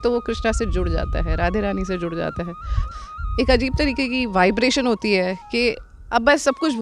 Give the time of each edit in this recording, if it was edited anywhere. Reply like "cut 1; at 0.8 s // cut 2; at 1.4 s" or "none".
cut 1; at 2.8 s